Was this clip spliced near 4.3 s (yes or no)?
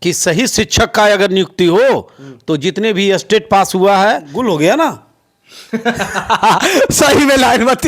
yes